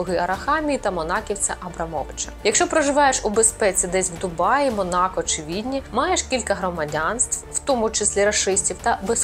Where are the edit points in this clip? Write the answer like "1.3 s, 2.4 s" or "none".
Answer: 2.2 s